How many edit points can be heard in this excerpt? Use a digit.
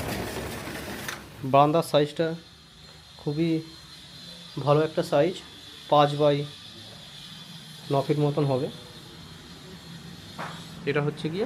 0